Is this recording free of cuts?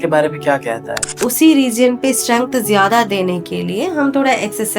no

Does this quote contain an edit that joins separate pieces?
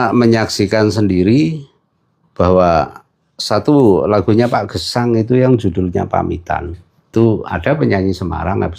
yes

